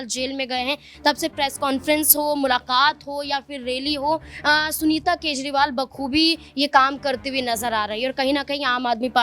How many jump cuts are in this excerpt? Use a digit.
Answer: 0